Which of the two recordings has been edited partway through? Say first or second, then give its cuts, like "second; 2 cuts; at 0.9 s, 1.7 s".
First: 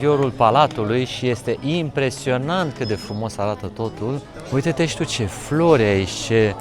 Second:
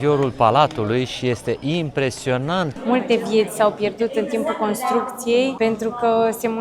second; 2 cuts; at 2.7 s, 5.5 s